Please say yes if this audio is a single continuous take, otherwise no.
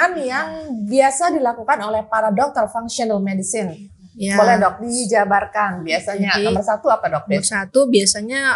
yes